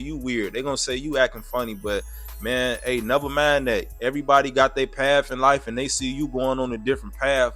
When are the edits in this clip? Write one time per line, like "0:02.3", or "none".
0:03.9